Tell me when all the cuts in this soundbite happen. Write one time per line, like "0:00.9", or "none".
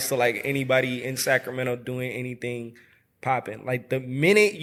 none